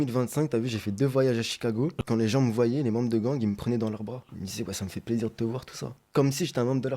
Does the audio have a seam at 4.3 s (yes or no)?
yes